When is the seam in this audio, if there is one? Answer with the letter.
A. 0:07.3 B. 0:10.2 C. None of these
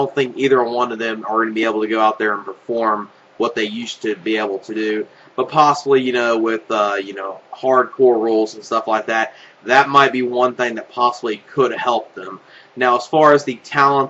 A